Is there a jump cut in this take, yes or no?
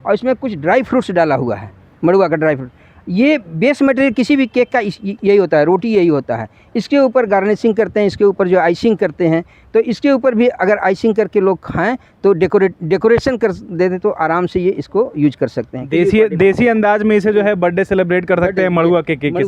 no